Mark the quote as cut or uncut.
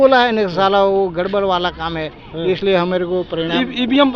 uncut